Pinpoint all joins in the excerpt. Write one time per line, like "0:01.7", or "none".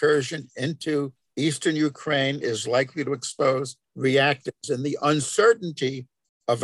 0:01.2
0:03.8